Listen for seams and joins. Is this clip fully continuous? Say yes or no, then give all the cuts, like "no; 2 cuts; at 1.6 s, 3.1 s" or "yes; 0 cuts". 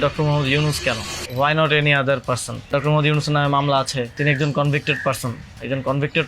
no; 3 cuts; at 1.2 s, 2.7 s, 4.2 s